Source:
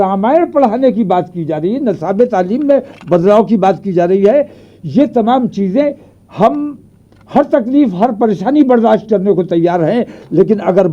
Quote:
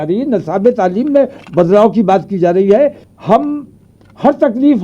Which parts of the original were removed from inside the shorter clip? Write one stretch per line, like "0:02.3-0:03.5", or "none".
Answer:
0:04.6-0:06.2